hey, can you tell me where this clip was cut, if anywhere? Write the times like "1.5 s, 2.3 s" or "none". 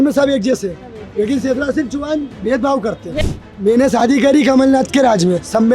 3.2 s